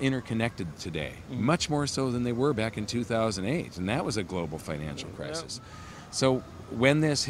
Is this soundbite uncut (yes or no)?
yes